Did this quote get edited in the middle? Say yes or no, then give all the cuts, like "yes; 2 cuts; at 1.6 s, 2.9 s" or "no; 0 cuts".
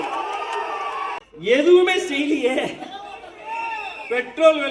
yes; 1 cut; at 1.3 s